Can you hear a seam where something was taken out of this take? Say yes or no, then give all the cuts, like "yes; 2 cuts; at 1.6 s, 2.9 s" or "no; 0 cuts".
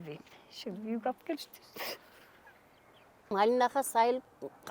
yes; 1 cut; at 3.3 s